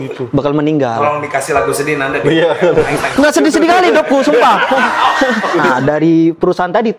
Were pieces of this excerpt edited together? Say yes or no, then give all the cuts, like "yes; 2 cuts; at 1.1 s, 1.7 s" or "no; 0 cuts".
yes; 1 cut; at 5.7 s